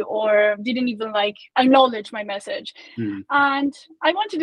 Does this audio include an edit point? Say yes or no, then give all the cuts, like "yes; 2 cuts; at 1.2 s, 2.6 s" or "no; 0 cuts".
yes; 1 cut; at 1.4 s